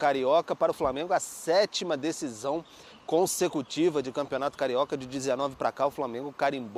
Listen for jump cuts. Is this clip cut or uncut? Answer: uncut